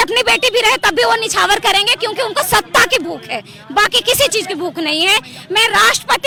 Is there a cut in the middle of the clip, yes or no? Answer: no